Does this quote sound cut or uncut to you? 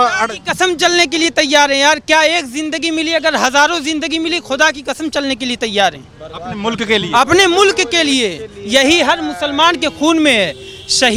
uncut